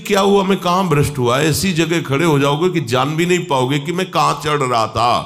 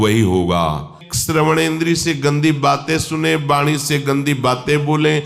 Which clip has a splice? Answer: second; 1 cut; at 1.1 s

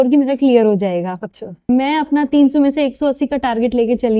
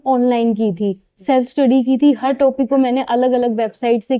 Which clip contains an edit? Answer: first; 1 cut; at 1.6 s

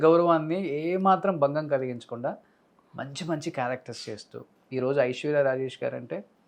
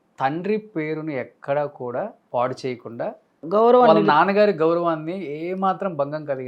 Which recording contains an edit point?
second; 2 cuts; at 2.2 s, 3.4 s

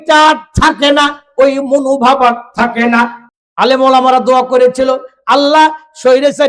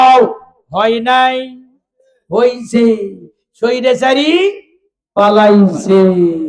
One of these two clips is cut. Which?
first; 1 cut; at 3.2 s

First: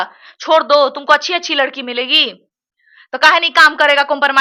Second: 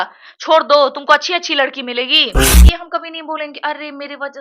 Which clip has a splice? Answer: second; 1 cut; at 2.5 s

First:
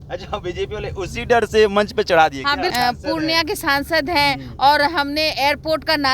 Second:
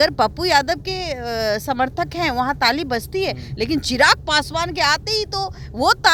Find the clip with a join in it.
first; 1 cut; at 2.7 s

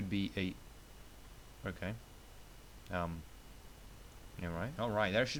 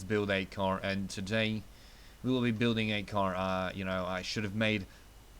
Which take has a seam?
second; 1 cut; at 1.0 s

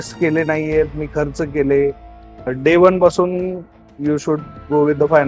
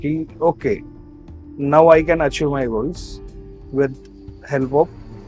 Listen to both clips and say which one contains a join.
first; 1 cut; at 2.5 s

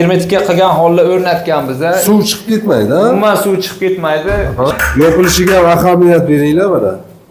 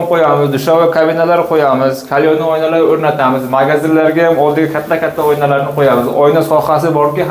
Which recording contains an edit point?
first; 1 cut; at 4.7 s

